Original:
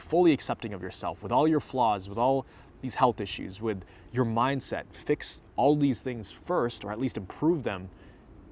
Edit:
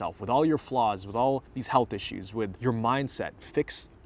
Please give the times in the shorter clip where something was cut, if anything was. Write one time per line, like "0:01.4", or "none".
0:01.5
0:02.5